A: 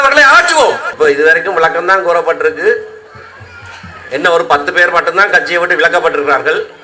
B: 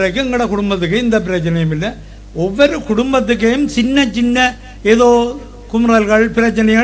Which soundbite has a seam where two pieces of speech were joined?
A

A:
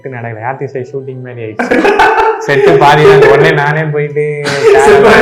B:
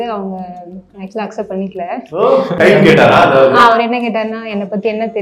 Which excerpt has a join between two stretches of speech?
B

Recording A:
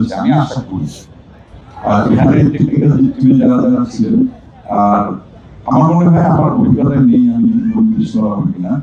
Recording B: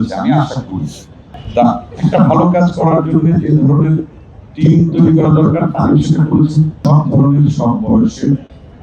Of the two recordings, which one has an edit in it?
B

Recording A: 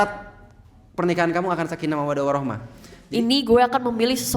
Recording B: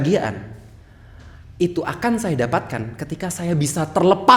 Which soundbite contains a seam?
A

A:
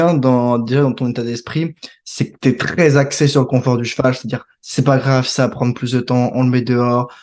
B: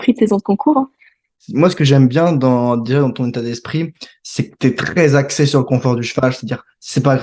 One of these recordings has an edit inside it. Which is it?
B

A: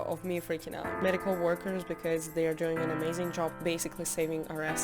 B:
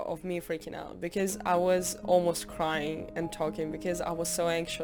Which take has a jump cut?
A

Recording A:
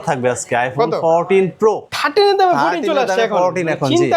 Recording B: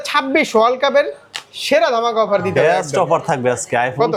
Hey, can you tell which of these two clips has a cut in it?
A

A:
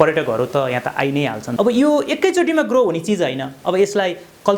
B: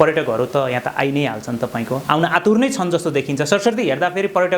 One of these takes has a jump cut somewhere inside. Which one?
A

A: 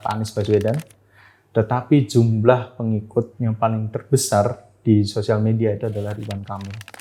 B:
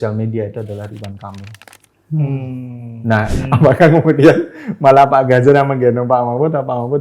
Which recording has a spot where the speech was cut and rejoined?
B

